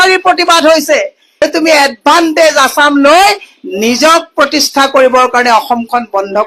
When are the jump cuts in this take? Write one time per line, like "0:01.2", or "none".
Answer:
0:01.3